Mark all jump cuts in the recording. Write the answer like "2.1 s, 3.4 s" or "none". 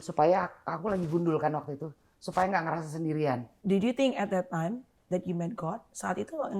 3.5 s